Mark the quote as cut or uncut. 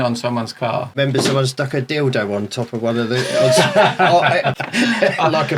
cut